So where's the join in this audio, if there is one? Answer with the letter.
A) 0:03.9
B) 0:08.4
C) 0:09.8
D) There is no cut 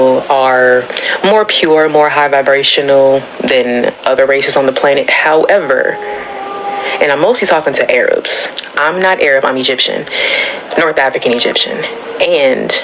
D